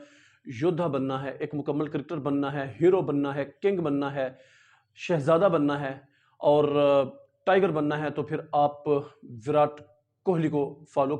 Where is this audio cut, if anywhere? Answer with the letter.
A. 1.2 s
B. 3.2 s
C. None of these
C